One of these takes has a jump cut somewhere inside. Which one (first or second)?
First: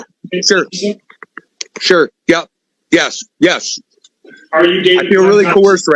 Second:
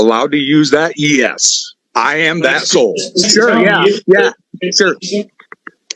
second